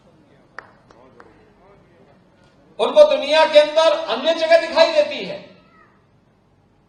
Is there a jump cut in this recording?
no; 0 cuts

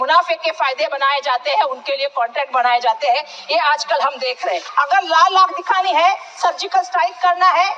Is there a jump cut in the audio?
yes; 1 cut; at 4.6 s

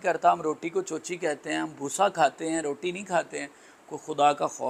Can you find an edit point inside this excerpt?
no; 0 cuts

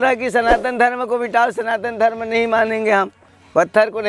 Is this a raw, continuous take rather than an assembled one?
yes; 0 cuts

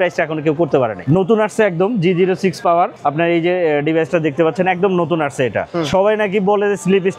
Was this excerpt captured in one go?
no; 3 cuts; at 1.0 s, 3.0 s, 5.6 s

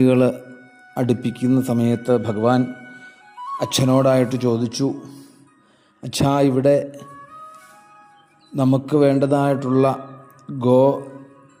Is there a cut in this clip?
no; 0 cuts

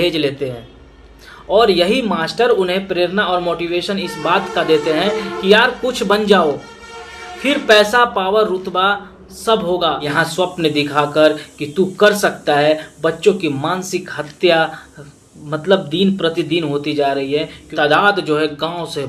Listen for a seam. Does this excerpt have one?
yes; 2 cuts; at 10.1 s, 17.6 s

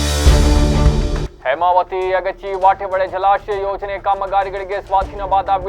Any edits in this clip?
no; 0 cuts

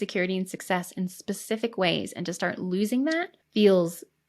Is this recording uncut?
no; 1 cut; at 3.4 s

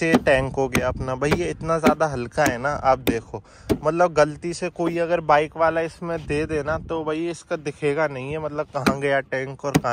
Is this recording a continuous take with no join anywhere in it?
yes; 0 cuts

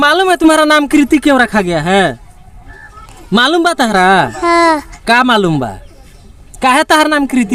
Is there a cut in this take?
no; 0 cuts

